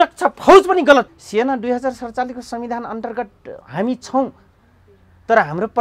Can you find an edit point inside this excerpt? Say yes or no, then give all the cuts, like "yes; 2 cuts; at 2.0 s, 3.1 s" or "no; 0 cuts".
yes; 1 cut; at 1.2 s